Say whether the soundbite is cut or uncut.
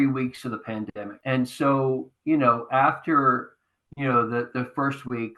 cut